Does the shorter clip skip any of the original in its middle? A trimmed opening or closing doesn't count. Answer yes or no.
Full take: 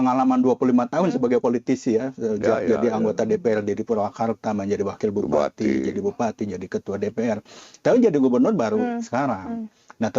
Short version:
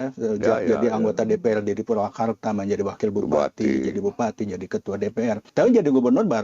yes